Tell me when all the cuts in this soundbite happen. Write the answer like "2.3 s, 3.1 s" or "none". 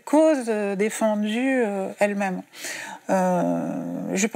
none